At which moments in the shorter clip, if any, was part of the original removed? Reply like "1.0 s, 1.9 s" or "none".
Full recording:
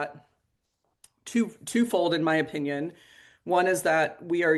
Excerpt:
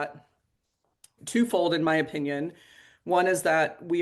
1.2 s